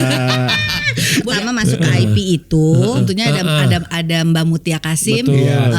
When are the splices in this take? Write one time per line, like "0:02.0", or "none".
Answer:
0:01.3
0:03.0